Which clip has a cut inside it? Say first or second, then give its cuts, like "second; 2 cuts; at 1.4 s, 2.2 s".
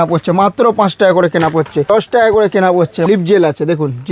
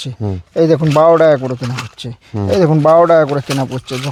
first; 2 cuts; at 1.9 s, 3.1 s